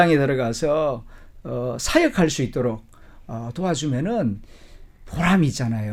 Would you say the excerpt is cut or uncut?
uncut